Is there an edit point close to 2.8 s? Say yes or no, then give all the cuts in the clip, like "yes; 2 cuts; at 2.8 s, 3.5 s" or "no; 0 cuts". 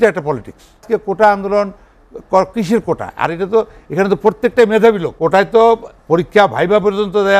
no; 2 cuts; at 0.8 s, 5.1 s